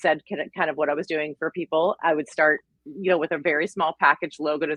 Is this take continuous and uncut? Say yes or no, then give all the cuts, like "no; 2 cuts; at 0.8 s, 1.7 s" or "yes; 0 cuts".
yes; 0 cuts